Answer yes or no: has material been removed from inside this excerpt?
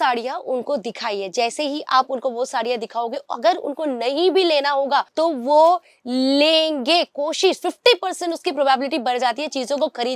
no